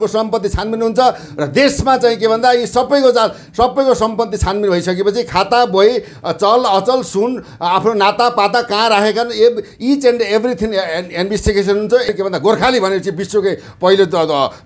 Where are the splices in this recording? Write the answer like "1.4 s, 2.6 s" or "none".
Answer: 12.1 s